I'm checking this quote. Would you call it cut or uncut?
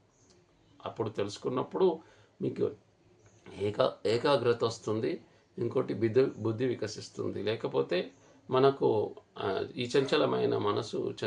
uncut